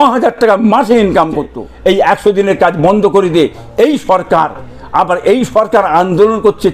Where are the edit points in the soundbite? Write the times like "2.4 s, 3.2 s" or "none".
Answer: 1.6 s